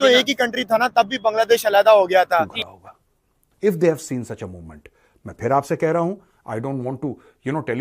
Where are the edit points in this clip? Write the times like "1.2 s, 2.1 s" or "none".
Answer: 2.6 s

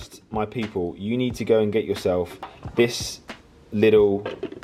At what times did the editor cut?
none

